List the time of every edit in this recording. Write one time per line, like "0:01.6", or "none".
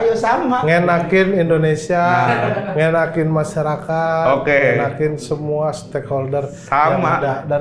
none